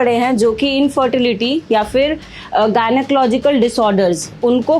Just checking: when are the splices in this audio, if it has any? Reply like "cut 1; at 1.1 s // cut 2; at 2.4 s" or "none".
none

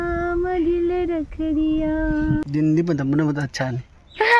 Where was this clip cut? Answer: cut 1; at 2.4 s

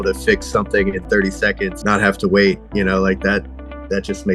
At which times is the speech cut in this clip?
cut 1; at 1.8 s

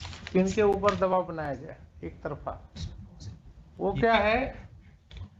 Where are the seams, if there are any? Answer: none

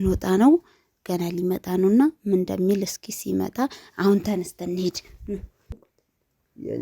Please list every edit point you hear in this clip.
cut 1; at 5.9 s

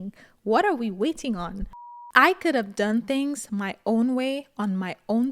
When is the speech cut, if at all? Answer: cut 1; at 2.0 s

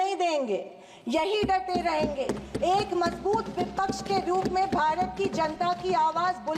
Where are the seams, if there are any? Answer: none

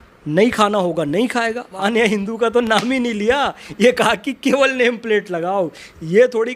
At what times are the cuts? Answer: cut 1; at 1.7 s

